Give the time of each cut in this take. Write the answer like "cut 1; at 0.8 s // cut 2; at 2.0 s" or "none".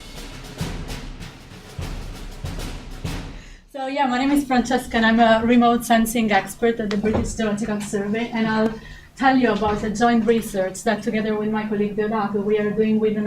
cut 1; at 3.5 s